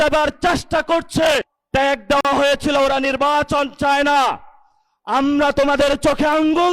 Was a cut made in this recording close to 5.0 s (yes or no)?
no